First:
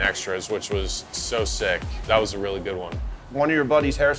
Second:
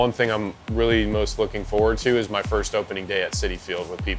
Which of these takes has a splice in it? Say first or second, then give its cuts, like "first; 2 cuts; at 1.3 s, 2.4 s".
first; 2 cuts; at 2.0 s, 3.2 s